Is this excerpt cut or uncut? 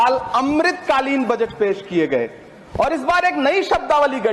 uncut